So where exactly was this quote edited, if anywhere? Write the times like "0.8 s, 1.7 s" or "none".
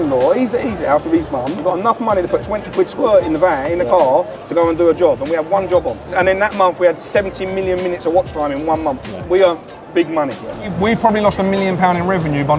1.6 s, 6.1 s, 9.2 s, 10.7 s

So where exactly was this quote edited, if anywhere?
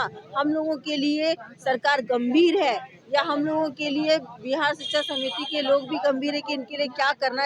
none

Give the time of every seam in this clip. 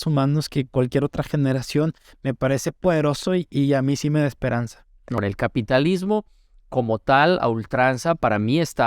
5.2 s

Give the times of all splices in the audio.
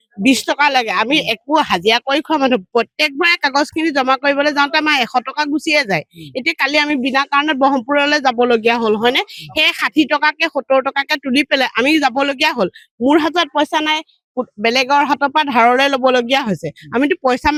none

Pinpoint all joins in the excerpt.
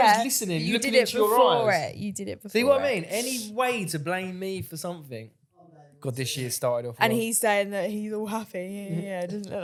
none

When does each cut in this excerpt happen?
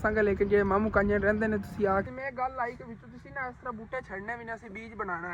2.0 s

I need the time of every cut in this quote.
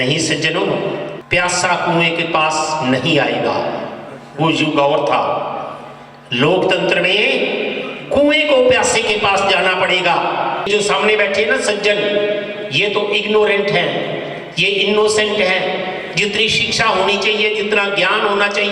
1.2 s, 10.7 s

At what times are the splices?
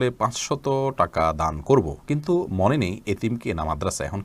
none

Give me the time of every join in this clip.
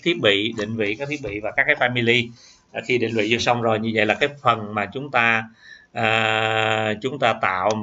none

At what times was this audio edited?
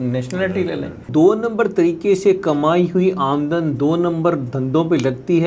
1.1 s

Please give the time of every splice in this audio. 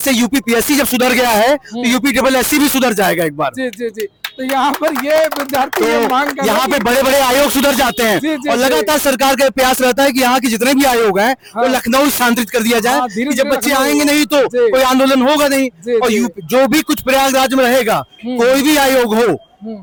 none

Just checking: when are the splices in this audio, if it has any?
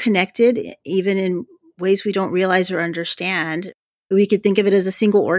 none

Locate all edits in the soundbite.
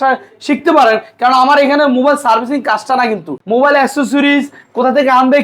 3.4 s

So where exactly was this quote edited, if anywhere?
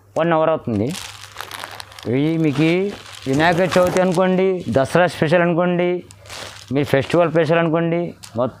none

